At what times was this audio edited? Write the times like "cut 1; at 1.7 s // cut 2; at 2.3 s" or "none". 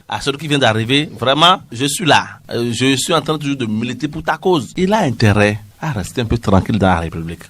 cut 1; at 4.7 s